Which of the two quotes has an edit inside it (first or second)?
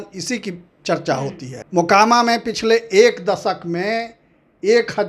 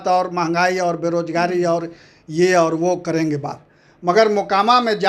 first